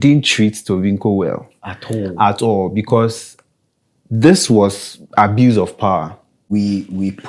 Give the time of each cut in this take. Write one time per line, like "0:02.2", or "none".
0:06.4